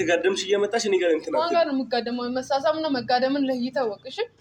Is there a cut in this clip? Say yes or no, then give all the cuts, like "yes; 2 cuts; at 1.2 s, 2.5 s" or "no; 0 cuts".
no; 0 cuts